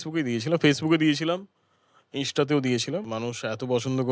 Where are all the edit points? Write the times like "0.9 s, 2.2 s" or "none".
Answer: 3.1 s